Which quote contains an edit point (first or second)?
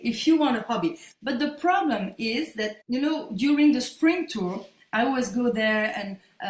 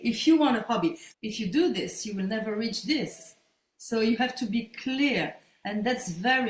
second